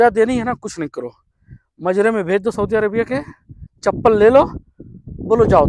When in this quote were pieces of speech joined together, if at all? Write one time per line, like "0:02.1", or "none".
none